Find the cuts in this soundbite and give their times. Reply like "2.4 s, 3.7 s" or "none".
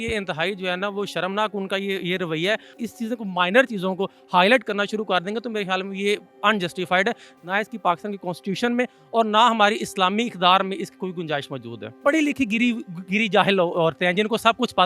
2.7 s, 7.3 s, 12.0 s